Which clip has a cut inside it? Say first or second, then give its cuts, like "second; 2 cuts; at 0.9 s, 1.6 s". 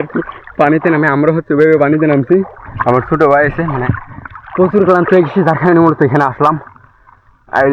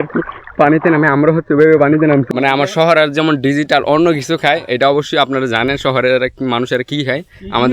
second; 1 cut; at 2.2 s